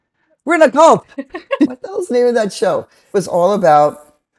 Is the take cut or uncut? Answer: cut